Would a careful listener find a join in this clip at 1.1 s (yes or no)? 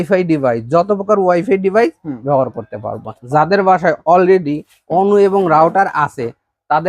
no